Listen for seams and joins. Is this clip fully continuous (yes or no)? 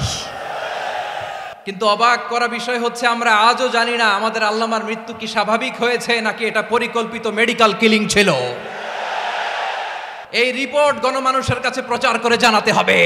no